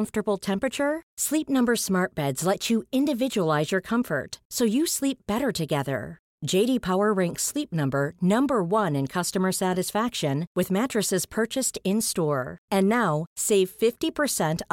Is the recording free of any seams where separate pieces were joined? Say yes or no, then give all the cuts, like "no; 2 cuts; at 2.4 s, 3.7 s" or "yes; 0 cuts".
yes; 0 cuts